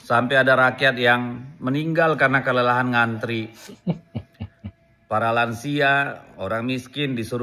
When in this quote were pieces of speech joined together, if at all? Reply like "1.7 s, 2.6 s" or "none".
6.0 s